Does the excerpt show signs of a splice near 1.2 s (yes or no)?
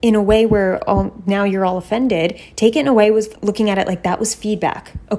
no